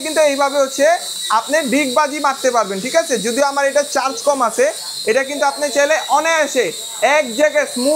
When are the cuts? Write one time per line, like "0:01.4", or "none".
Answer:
none